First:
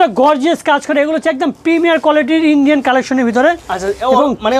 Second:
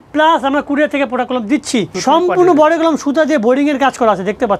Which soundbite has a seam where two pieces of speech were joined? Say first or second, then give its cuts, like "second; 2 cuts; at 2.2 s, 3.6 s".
second; 1 cut; at 1.9 s